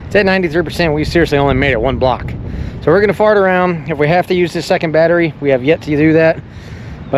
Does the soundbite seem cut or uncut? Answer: uncut